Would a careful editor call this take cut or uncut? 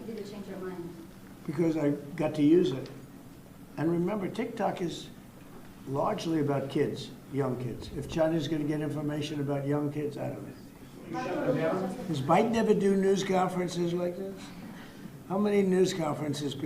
cut